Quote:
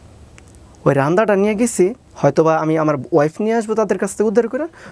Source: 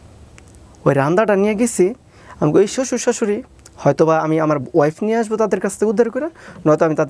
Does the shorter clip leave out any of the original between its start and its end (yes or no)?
yes